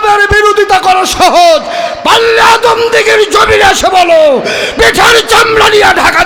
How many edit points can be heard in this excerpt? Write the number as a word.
zero